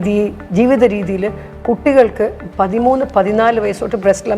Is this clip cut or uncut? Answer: uncut